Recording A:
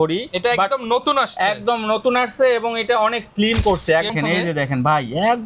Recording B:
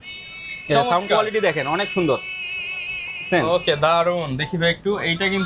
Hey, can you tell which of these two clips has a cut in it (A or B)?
A